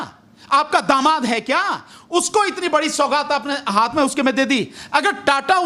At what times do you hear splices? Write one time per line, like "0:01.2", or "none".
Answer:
none